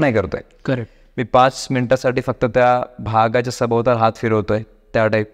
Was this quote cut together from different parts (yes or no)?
no